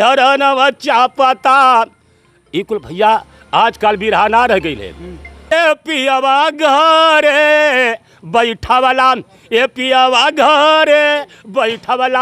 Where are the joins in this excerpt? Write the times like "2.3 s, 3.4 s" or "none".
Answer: 5.5 s